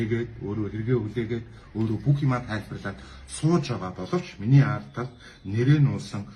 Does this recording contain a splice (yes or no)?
no